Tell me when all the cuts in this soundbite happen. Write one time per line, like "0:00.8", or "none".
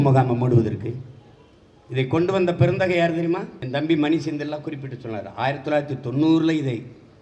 0:03.6